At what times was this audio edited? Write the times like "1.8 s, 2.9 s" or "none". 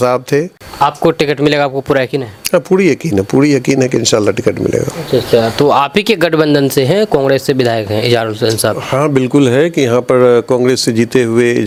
none

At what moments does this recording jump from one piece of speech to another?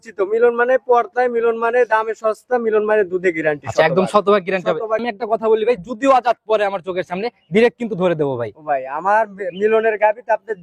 5.1 s

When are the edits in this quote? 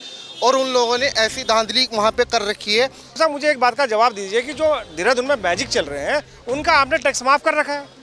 3.1 s

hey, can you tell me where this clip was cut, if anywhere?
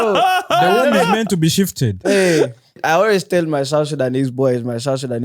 2.8 s

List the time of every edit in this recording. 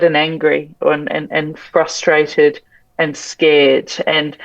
none

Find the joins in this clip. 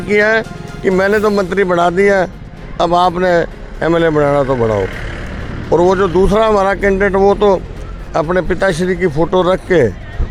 none

